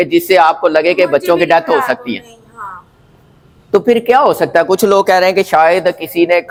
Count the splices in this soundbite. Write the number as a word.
zero